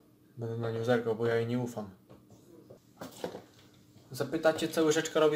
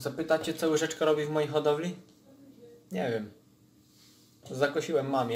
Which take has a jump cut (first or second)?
first